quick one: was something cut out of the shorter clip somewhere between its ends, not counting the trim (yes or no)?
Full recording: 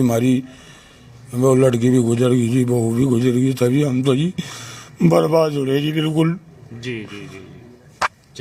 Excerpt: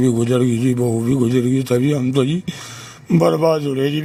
no